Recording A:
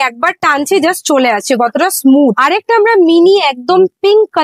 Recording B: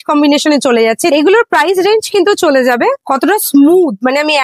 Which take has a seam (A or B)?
B